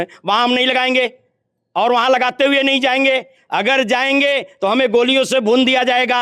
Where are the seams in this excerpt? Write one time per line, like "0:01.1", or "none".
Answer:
none